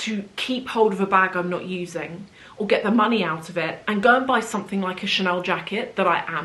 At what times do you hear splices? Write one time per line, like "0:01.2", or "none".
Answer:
none